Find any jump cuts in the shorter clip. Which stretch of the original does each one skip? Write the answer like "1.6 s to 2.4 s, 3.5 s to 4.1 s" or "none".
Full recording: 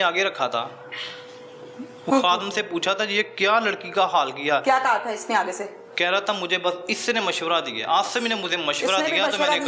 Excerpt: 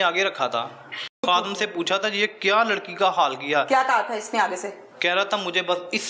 1.2 s to 2.2 s